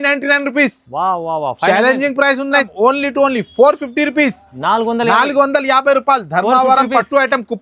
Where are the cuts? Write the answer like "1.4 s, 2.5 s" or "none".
2.6 s